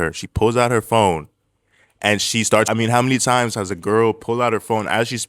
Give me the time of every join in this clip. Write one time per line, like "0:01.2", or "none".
0:02.7